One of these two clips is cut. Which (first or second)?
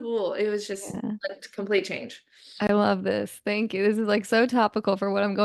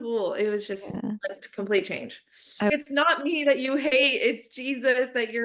second